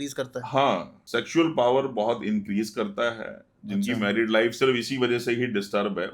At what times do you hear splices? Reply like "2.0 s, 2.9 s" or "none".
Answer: 1.0 s